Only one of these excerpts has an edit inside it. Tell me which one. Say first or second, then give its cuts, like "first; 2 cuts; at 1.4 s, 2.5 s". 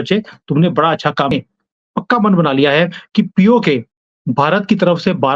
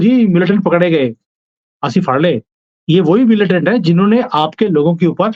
first; 1 cut; at 1.3 s